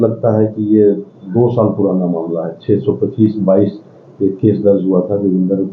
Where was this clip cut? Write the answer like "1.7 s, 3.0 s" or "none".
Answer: none